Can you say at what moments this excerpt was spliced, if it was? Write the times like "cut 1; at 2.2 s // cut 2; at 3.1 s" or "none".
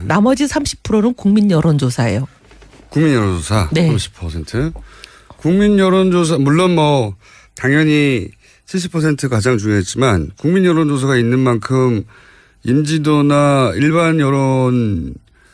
none